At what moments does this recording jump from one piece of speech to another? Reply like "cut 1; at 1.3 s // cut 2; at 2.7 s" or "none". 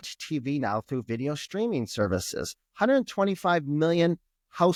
none